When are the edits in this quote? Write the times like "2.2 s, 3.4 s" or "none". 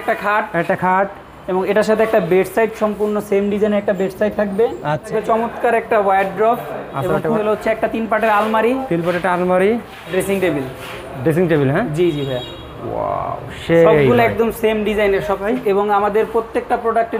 5.1 s, 7.4 s, 10.1 s, 15.5 s

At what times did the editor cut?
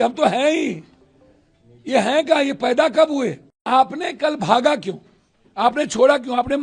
3.6 s

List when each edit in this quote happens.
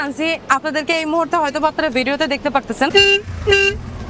2.9 s

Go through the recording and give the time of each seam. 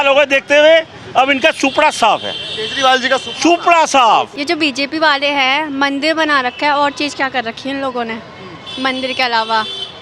4.3 s

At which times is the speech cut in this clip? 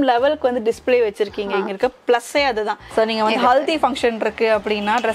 2.8 s

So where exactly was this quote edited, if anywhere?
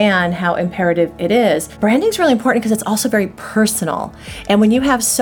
1.7 s

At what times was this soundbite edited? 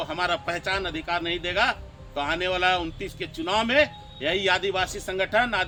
none

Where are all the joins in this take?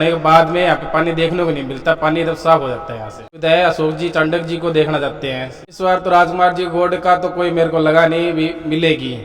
3.4 s, 5.7 s

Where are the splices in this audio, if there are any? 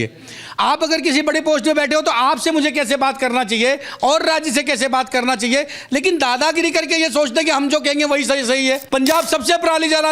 8.8 s

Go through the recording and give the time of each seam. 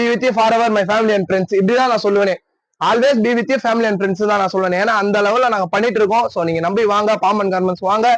none

